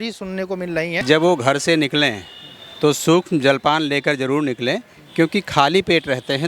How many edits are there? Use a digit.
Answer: 1